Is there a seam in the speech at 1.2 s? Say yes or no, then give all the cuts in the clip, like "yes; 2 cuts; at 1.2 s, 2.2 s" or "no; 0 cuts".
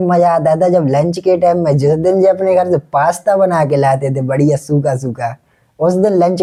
no; 0 cuts